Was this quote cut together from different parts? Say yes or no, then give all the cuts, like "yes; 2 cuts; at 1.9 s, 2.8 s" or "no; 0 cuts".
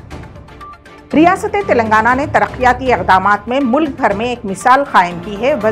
yes; 1 cut; at 1.0 s